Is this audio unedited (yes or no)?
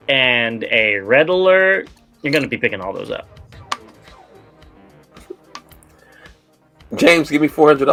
yes